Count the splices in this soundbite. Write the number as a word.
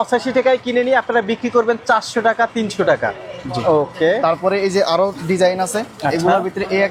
zero